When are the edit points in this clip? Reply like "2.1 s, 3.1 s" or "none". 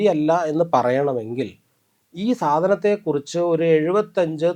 none